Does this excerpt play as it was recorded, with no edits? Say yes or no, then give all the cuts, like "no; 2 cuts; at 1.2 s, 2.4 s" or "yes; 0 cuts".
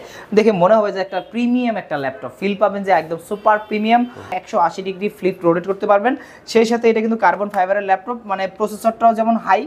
no; 1 cut; at 4.3 s